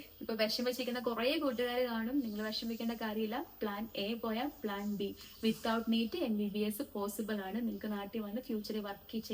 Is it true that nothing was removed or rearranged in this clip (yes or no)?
yes